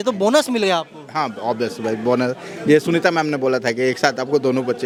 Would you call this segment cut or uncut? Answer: uncut